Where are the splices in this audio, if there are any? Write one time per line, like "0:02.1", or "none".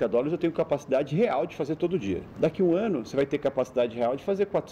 0:02.3